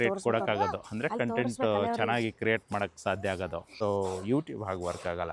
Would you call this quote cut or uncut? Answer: cut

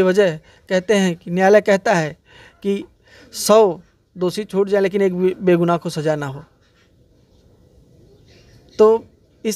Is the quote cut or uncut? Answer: uncut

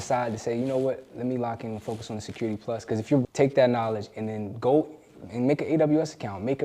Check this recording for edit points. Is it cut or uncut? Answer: cut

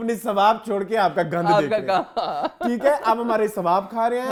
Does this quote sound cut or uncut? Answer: uncut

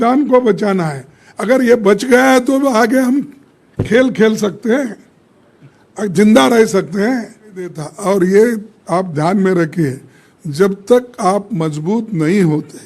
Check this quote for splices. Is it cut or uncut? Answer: cut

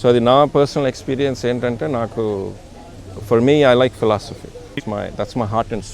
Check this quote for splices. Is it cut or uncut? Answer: cut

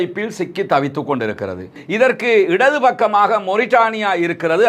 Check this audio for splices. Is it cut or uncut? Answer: cut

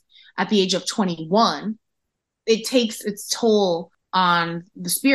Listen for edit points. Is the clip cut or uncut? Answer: cut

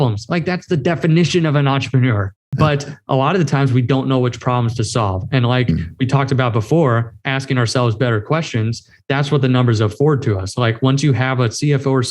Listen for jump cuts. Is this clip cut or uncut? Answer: cut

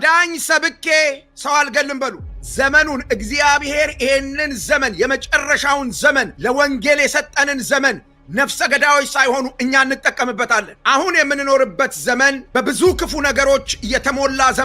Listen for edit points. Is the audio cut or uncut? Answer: cut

